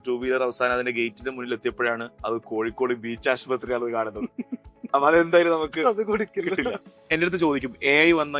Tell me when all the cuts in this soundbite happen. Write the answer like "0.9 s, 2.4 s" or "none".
2.1 s, 6.9 s